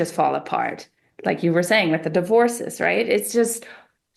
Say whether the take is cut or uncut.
uncut